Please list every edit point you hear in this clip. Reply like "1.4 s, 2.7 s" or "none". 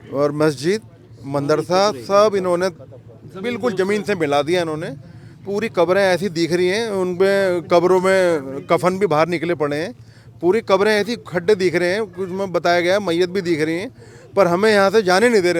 none